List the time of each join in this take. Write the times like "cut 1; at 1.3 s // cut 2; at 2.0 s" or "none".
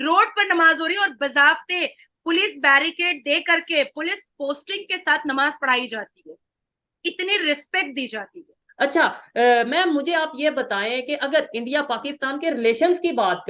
none